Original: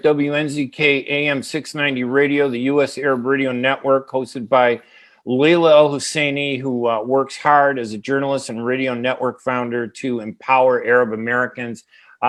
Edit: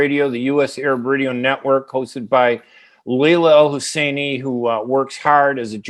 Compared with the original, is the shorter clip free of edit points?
yes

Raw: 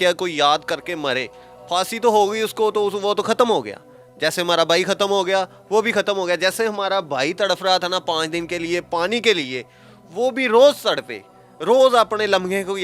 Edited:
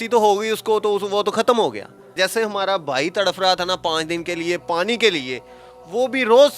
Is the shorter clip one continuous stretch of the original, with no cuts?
no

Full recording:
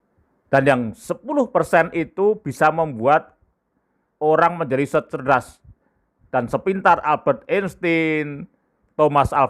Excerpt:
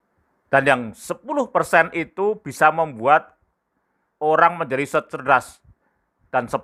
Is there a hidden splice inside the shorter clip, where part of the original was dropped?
no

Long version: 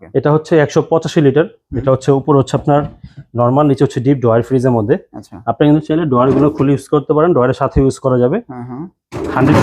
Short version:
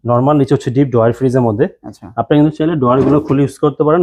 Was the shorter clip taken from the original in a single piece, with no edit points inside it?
yes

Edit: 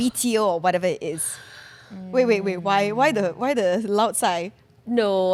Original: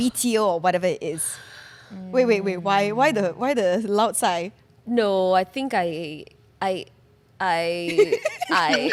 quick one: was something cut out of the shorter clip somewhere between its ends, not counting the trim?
no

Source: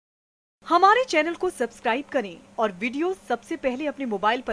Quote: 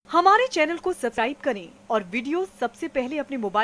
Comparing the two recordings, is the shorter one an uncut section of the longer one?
no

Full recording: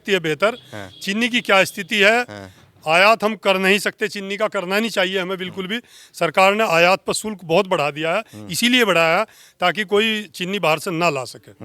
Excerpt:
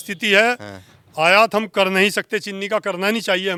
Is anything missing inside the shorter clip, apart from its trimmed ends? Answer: no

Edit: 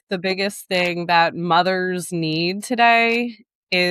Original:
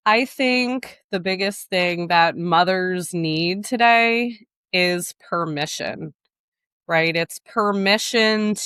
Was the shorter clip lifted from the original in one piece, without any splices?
yes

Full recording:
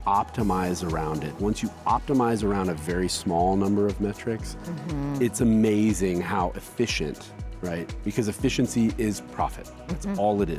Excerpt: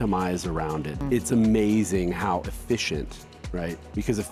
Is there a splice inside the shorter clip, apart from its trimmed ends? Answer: yes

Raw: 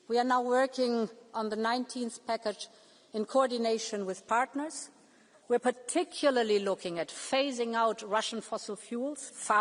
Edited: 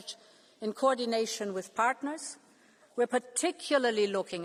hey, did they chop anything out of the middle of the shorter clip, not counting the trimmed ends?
no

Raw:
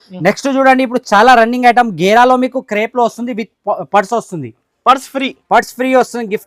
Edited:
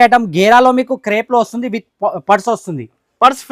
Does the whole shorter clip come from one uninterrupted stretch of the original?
yes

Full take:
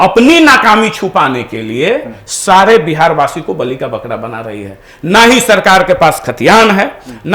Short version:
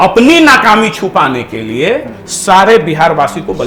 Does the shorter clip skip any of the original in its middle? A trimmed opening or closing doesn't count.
no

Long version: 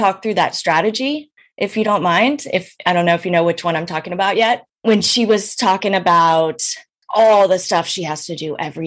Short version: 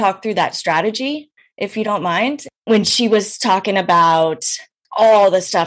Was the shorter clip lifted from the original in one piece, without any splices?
no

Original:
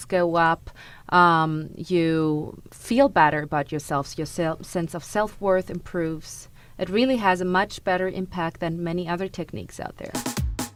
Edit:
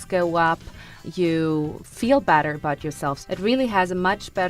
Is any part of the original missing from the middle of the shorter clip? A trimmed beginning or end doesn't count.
yes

